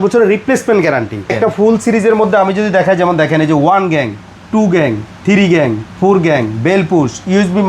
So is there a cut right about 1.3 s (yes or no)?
yes